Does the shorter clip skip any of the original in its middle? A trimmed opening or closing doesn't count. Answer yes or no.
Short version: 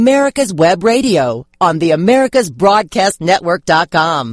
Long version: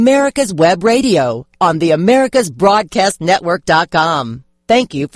no